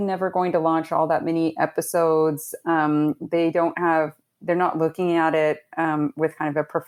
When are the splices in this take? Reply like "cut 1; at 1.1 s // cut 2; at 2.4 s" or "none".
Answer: none